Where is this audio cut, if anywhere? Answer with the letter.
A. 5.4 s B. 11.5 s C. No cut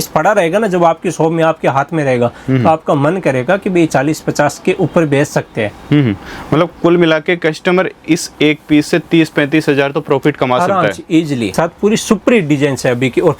B